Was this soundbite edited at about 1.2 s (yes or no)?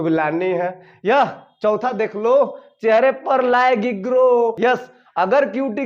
no